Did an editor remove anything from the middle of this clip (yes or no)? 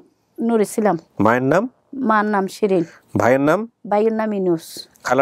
no